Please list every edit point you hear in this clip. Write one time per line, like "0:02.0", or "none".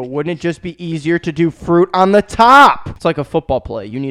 0:02.9